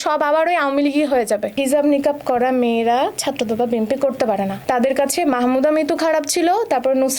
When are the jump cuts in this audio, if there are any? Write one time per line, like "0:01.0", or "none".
0:01.6
0:04.6